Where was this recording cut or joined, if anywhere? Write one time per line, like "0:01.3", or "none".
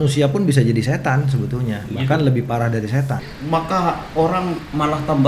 0:03.2